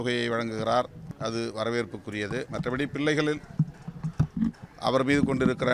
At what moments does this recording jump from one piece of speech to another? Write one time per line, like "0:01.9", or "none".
0:01.0
0:02.5